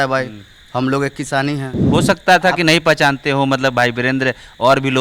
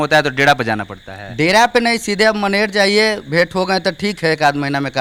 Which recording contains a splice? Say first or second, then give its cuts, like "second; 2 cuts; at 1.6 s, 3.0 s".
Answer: first; 1 cut; at 1.7 s